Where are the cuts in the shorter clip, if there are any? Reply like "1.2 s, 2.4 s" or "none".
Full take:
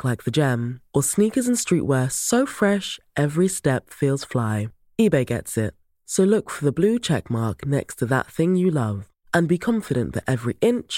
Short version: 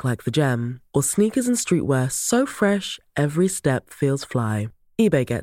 none